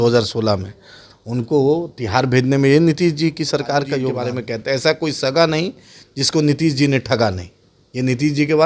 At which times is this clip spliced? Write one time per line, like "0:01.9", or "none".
0:04.2